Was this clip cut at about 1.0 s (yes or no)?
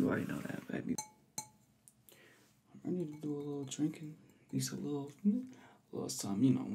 yes